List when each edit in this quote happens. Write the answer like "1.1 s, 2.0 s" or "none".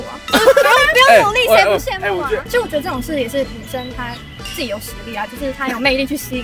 2.4 s